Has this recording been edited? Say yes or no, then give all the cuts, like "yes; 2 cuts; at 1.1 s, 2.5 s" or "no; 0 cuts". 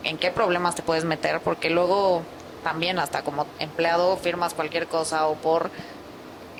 no; 0 cuts